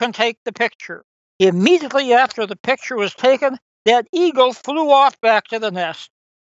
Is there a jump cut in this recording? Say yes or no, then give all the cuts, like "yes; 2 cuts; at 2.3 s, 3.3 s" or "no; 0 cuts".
yes; 1 cut; at 1.1 s